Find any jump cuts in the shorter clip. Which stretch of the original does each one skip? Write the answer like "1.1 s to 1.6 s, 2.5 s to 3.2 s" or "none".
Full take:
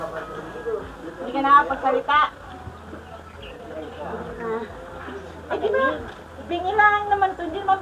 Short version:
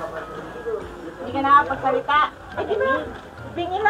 2.4 s to 5.4 s